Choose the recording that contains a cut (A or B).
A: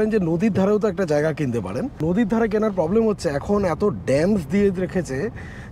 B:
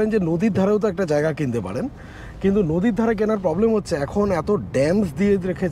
A